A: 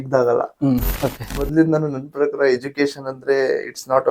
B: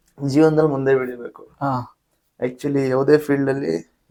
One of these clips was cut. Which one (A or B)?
A